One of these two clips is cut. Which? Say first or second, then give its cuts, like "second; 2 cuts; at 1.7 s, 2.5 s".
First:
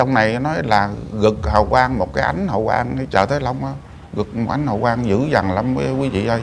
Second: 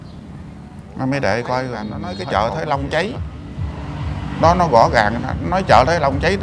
second; 1 cut; at 2.2 s